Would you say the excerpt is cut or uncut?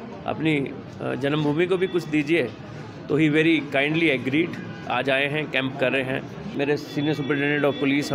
cut